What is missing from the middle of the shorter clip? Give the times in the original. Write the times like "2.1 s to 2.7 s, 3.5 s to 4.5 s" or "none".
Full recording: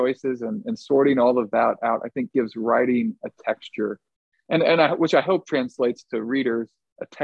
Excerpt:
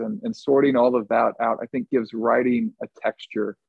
none